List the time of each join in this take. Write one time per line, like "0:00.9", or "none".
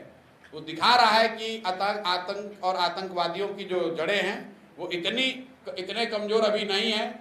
none